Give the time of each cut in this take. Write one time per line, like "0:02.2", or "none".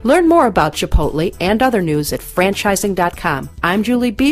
0:01.0